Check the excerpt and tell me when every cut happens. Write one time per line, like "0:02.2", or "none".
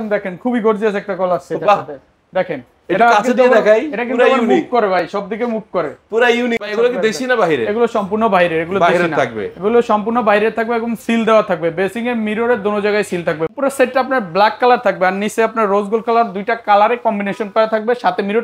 0:06.7
0:13.5

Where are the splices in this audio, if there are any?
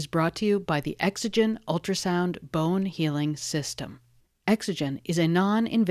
none

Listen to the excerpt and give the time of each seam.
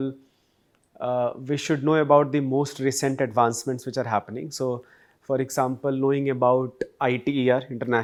none

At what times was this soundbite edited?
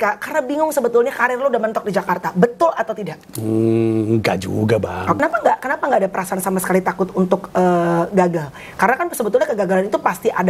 0:05.2

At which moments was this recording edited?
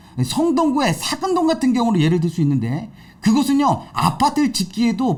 none

